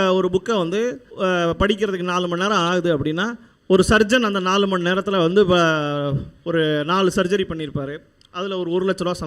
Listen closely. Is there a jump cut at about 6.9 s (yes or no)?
no